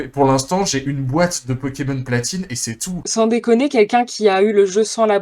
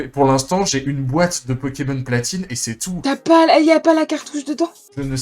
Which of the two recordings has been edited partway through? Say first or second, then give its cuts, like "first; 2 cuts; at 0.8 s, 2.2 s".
first; 1 cut; at 2.9 s